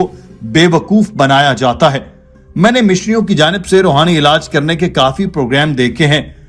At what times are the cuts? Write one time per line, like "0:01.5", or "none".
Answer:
none